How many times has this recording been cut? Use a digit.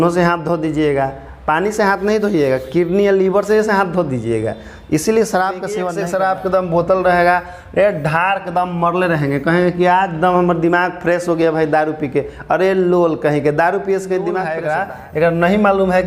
2